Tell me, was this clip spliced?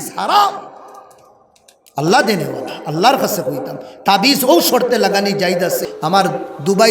yes; 1 cut; at 5.9 s

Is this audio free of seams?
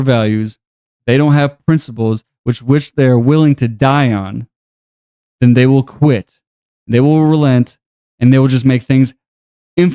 yes; 0 cuts

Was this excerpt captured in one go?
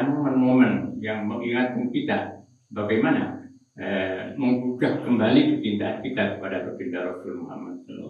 yes; 0 cuts

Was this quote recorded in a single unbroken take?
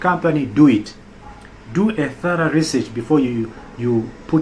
yes; 0 cuts

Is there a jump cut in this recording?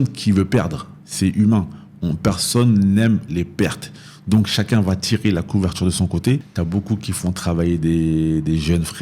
yes; 1 cut; at 6.5 s

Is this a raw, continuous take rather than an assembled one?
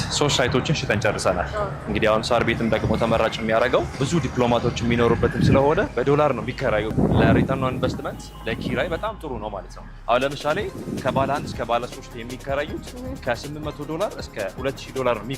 no; 3 cuts; at 4.0 s, 5.9 s, 6.9 s

